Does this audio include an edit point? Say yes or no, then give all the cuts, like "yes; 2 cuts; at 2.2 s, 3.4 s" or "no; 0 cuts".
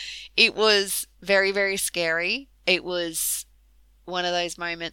yes; 1 cut; at 2.5 s